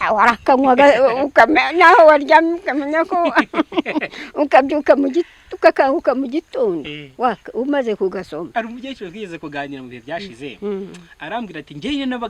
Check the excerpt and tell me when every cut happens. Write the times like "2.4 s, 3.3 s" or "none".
none